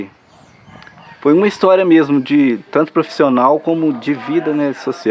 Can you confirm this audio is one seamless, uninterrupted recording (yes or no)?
yes